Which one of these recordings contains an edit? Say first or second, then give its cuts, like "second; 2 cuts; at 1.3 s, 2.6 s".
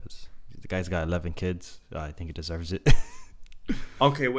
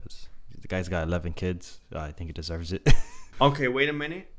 second; 1 cut; at 3.3 s